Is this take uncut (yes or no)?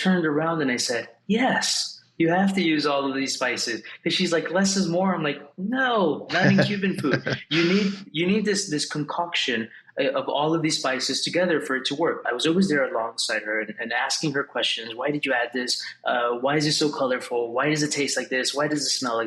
no